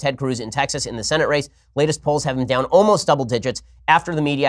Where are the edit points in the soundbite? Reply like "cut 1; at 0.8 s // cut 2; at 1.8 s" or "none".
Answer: none